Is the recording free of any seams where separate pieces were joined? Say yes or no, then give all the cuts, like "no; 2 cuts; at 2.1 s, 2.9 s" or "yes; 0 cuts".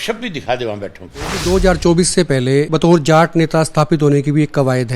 no; 2 cuts; at 1.4 s, 2.7 s